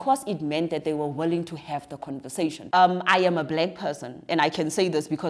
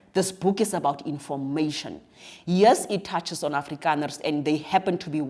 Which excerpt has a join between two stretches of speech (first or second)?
first